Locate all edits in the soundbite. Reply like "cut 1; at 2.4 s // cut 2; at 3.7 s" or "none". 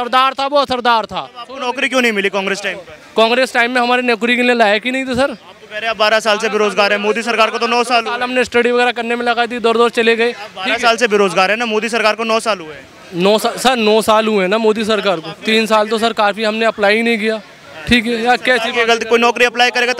none